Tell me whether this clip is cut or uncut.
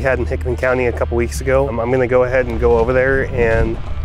cut